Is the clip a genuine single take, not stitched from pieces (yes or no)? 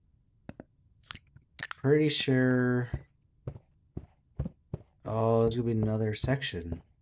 yes